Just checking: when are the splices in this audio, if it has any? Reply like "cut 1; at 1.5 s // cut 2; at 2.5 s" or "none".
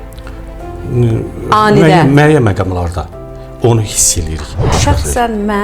cut 1; at 4.6 s